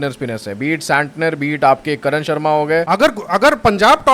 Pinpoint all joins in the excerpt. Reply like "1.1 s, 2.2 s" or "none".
2.9 s